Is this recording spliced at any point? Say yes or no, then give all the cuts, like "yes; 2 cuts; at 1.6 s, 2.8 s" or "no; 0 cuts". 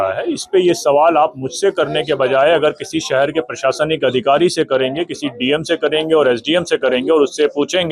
no; 0 cuts